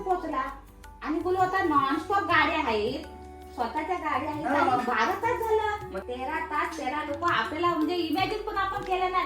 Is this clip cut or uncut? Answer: cut